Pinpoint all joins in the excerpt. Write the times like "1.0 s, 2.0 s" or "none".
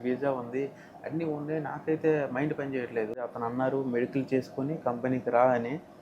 3.1 s